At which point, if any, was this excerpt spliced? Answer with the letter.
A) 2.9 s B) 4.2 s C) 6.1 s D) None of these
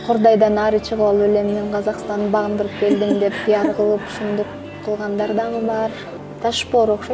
C